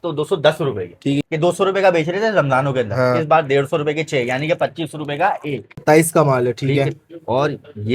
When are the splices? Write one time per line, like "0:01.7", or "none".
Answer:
0:01.2
0:05.8